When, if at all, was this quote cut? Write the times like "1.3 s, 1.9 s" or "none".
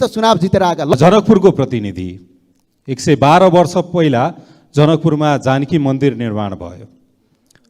0.9 s